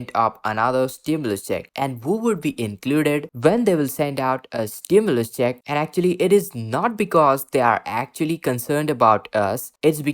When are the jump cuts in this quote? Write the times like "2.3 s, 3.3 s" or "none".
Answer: 3.3 s